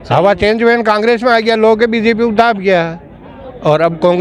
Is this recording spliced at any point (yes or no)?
no